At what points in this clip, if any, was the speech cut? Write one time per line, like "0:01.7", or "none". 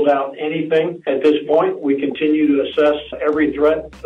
0:01.1
0:03.1